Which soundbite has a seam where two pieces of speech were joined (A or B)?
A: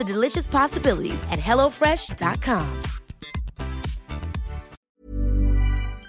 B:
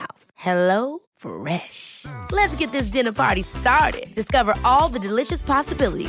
A